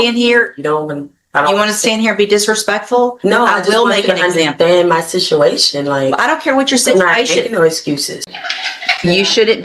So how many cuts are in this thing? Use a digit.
1